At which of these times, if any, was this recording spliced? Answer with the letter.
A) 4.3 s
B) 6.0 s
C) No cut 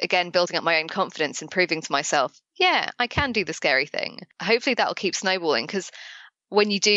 A